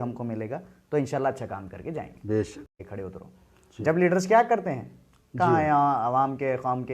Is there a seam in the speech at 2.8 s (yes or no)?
yes